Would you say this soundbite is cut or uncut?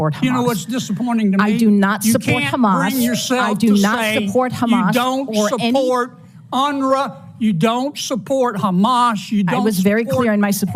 uncut